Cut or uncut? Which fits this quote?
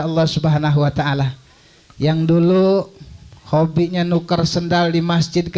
uncut